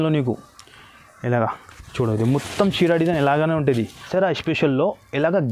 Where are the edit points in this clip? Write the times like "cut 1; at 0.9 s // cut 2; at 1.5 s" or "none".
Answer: cut 1; at 4.1 s